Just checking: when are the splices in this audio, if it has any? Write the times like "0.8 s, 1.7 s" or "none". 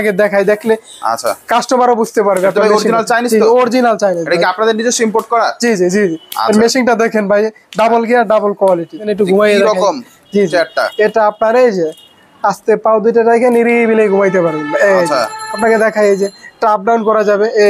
9.1 s